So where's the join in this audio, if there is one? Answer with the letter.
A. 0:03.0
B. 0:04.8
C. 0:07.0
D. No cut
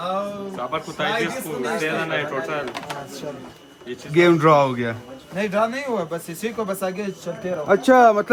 D